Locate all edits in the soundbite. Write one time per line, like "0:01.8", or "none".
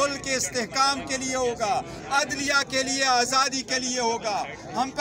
none